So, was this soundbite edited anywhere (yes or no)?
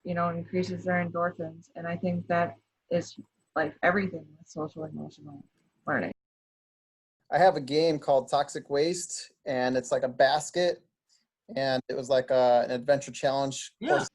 yes